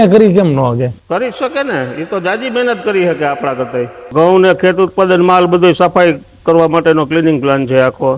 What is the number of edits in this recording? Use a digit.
1